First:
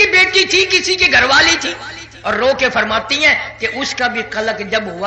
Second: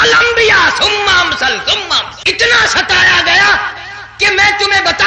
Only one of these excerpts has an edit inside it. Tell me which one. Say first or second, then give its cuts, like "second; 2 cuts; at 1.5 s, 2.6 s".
second; 1 cut; at 2.1 s